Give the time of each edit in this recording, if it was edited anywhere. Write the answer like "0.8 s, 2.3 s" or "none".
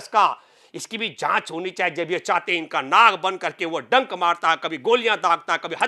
none